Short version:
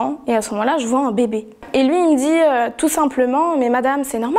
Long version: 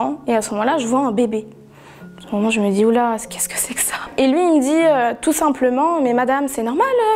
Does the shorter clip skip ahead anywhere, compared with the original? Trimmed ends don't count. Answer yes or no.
yes